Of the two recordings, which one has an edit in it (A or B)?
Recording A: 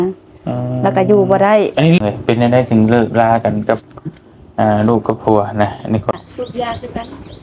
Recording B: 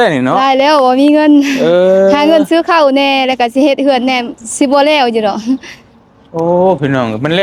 A